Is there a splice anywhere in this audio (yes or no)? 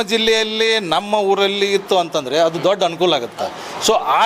no